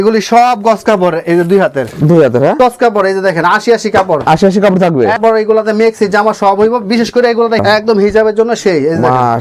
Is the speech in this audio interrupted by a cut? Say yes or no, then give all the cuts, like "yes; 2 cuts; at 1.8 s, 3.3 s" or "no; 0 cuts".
yes; 3 cuts; at 2.6 s, 5.2 s, 7.6 s